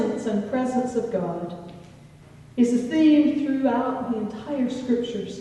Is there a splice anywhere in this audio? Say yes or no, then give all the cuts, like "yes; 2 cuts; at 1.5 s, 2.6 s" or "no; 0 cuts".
no; 0 cuts